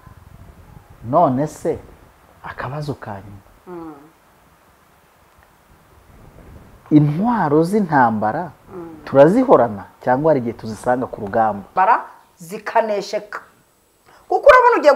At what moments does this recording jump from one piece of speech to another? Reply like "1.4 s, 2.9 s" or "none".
11.7 s